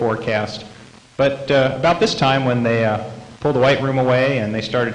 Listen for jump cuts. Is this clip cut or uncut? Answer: cut